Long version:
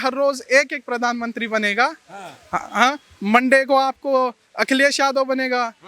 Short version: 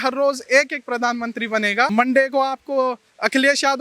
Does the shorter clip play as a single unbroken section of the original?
no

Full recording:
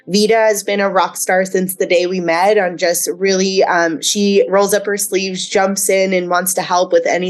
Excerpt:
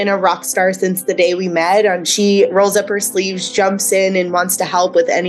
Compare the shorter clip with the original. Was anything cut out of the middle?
yes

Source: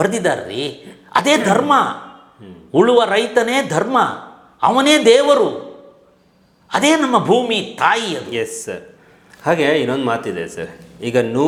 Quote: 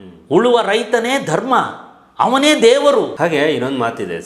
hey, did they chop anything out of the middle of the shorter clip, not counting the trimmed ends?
yes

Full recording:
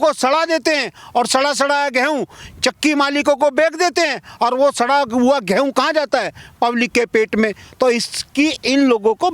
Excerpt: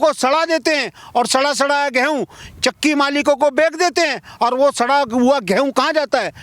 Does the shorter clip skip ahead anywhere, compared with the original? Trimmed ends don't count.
no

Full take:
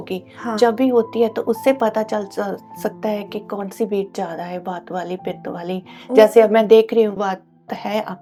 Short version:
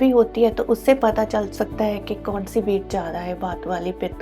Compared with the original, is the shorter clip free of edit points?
no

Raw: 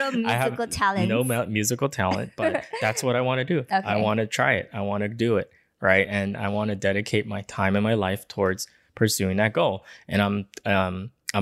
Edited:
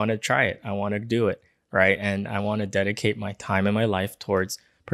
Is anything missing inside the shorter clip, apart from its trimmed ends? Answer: no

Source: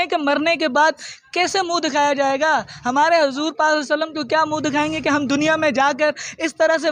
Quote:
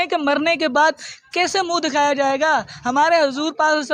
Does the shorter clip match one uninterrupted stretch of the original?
yes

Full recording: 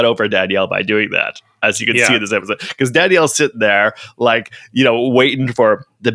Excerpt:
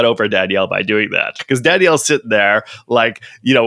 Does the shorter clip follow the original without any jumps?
no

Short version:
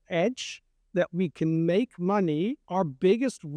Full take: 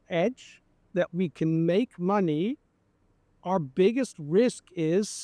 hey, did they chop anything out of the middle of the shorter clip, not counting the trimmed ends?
yes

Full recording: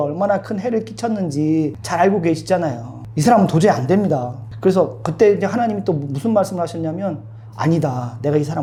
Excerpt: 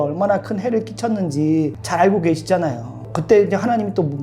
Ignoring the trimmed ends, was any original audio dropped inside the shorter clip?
yes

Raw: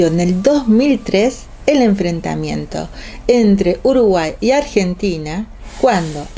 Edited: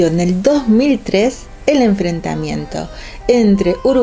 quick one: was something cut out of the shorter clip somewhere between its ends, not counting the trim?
no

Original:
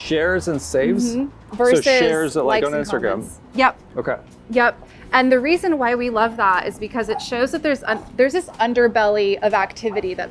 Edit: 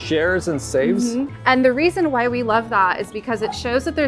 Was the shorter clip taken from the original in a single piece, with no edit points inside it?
no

